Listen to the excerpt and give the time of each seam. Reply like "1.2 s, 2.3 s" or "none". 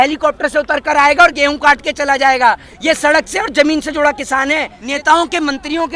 4.8 s